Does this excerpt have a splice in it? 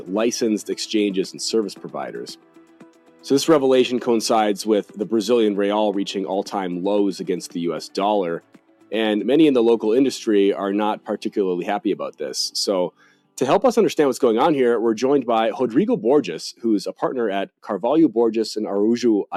no; 0 cuts

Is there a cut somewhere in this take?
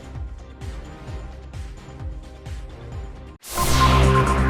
no; 0 cuts

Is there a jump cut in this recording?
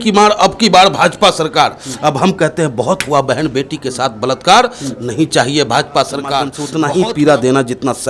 yes; 1 cut; at 6.6 s

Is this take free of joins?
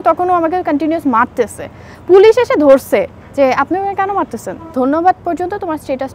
no; 1 cut; at 4.7 s

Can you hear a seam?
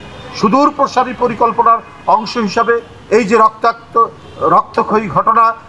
no; 0 cuts

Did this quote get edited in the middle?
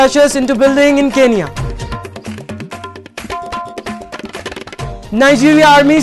no; 0 cuts

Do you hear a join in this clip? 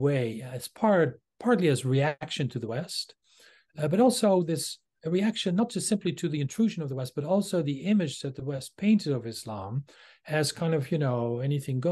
yes; 1 cut; at 2.2 s

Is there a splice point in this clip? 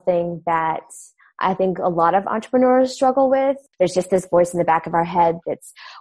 yes; 1 cut; at 3.7 s

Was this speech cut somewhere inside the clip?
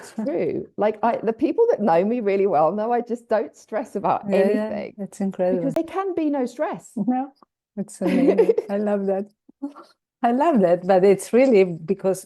yes; 1 cut; at 5.8 s

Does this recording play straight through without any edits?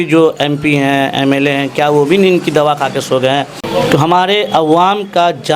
no; 1 cut; at 3.6 s

